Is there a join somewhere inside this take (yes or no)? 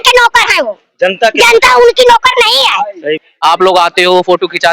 yes